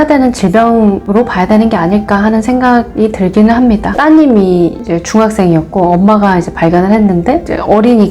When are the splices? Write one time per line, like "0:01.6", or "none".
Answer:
0:03.9